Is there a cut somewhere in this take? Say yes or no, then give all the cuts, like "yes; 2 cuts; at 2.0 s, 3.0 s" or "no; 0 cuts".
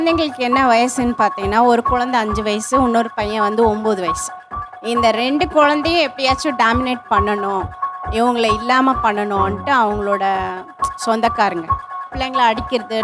no; 0 cuts